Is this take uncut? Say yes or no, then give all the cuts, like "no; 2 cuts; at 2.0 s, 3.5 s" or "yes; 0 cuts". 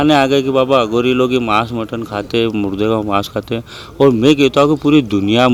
yes; 0 cuts